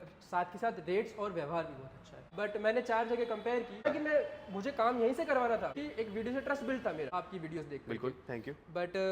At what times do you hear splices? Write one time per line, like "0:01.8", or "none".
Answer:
0:02.3
0:03.9
0:05.8
0:07.1